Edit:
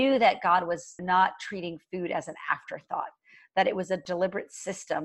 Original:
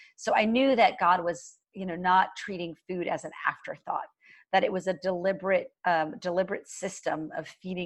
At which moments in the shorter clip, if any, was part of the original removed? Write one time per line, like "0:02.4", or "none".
0:00.9
0:04.0